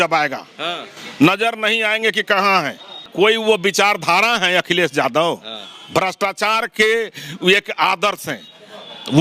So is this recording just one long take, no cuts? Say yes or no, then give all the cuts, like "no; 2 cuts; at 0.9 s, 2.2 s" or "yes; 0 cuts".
no; 1 cut; at 3.0 s